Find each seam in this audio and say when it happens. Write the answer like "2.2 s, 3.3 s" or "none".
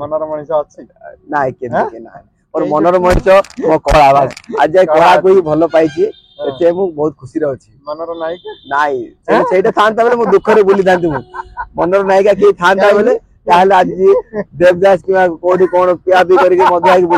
none